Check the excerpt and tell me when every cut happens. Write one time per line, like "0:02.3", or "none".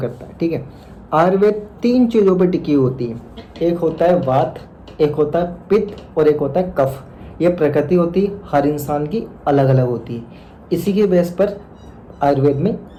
none

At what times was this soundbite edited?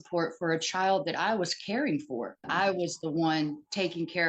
0:02.5

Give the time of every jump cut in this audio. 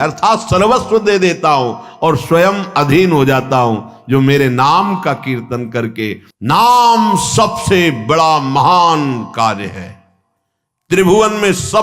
0:06.3

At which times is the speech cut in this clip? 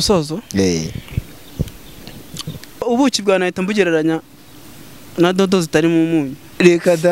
0:02.8

